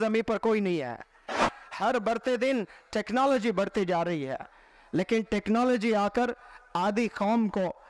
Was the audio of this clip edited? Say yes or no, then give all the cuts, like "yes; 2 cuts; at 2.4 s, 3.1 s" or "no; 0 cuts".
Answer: yes; 1 cut; at 1.6 s